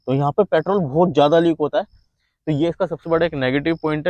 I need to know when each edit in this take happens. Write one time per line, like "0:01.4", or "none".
0:03.0